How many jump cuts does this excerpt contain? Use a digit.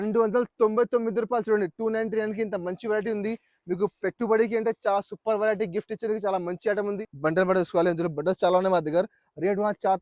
1